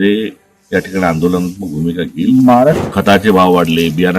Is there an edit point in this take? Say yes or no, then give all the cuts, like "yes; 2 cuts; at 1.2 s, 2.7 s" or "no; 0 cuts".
yes; 1 cut; at 2.8 s